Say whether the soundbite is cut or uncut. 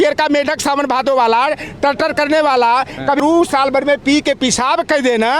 cut